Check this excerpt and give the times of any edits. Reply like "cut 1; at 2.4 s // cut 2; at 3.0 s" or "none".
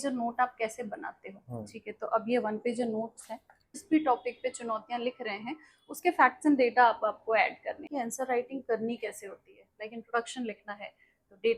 cut 1; at 3.7 s // cut 2; at 7.8 s